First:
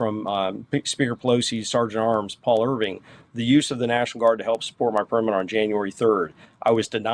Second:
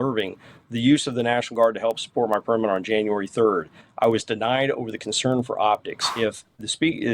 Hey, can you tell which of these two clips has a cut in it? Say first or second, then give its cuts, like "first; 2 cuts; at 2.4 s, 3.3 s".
second; 1 cut; at 6.1 s